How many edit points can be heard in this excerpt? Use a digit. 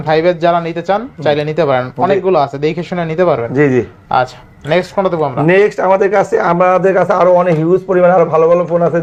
0